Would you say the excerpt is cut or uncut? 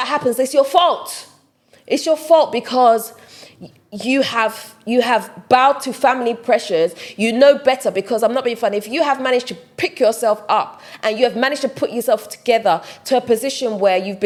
uncut